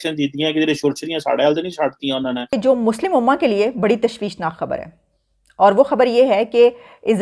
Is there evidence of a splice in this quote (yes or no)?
yes